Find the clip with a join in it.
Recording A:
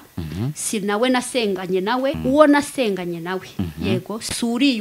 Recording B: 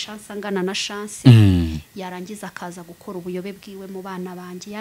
A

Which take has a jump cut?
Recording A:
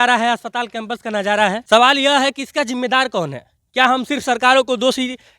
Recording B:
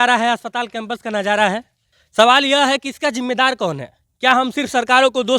A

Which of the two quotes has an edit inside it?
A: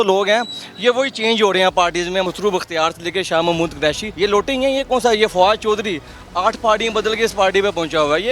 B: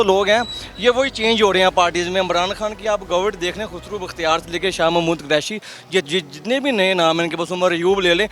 A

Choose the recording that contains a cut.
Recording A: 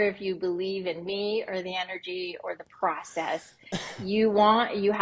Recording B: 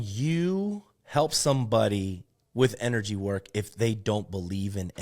B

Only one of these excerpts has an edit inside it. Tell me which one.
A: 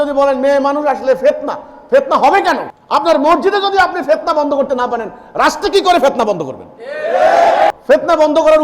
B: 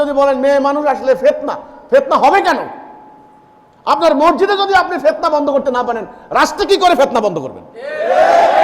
A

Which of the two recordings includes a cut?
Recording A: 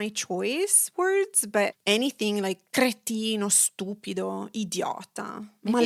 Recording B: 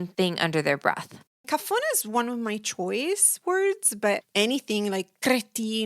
B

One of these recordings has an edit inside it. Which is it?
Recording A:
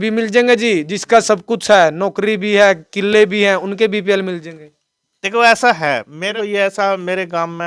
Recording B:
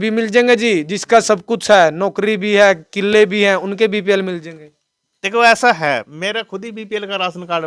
A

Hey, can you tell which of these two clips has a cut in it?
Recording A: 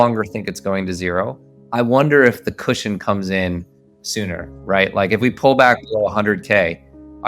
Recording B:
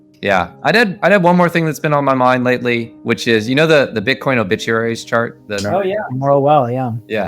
B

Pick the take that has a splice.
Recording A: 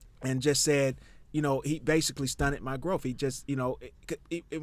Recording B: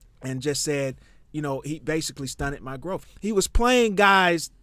B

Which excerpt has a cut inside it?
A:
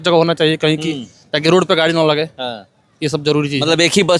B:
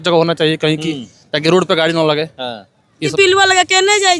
B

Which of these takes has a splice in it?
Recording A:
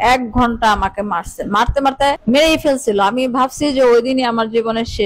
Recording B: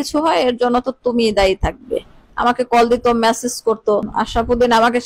B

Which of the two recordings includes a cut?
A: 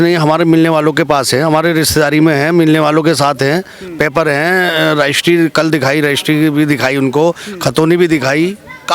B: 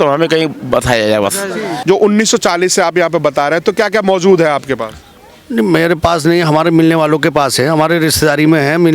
B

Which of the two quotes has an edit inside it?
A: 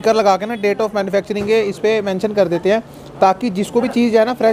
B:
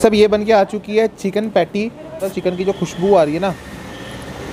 B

